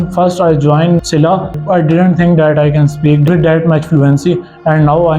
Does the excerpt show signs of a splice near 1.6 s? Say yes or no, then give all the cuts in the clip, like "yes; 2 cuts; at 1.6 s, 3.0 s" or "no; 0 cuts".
yes; 1 cut; at 1.6 s